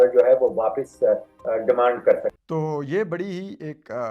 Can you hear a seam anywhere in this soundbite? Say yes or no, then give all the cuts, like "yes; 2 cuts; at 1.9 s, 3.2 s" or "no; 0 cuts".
yes; 1 cut; at 2.4 s